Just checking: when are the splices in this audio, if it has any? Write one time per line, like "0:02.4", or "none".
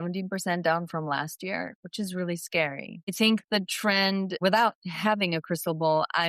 0:03.1
0:04.4